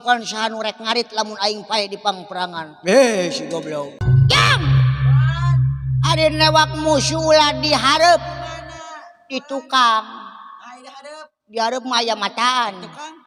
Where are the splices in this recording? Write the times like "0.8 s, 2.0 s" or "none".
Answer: 4.0 s